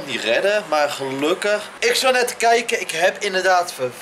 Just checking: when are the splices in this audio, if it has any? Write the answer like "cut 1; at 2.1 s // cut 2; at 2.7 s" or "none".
cut 1; at 1.7 s